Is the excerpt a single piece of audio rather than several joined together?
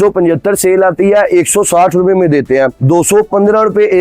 yes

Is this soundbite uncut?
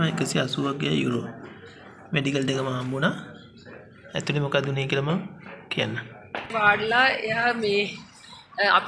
no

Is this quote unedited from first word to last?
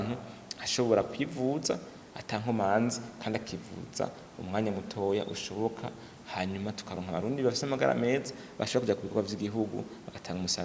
yes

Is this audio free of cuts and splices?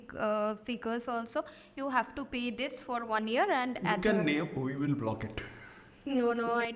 yes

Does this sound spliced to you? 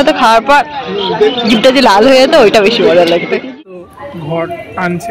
yes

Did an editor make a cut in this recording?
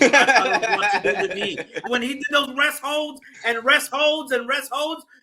yes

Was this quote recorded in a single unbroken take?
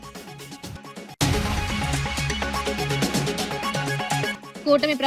no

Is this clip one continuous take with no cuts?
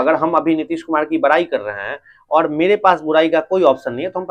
yes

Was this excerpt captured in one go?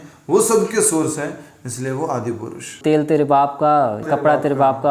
no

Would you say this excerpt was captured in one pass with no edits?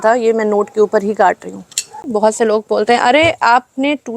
no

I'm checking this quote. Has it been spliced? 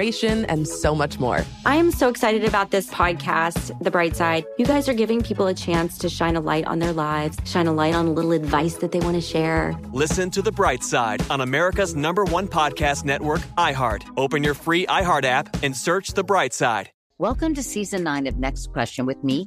yes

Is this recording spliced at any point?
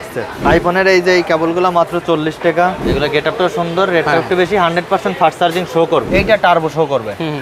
yes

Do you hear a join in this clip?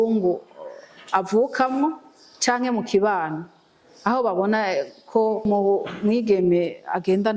yes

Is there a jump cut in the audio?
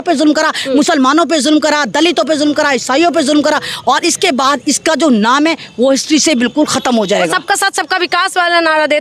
no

